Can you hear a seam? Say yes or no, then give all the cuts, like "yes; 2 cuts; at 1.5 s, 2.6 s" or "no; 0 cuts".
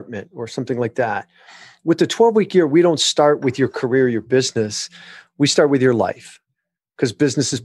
no; 0 cuts